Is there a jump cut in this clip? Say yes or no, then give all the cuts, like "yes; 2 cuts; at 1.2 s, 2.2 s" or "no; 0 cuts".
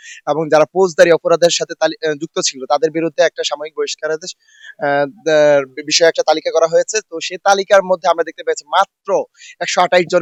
no; 0 cuts